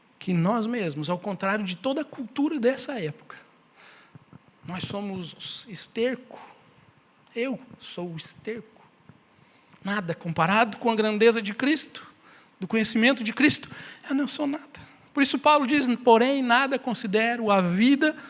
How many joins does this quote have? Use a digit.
0